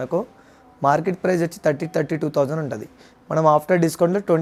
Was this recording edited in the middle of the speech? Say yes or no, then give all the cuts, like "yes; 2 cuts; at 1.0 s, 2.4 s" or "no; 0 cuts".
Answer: no; 0 cuts